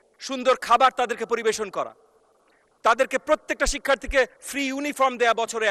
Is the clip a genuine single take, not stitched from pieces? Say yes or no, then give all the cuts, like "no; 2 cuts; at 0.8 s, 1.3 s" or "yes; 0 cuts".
yes; 0 cuts